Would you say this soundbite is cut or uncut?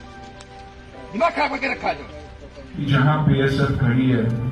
cut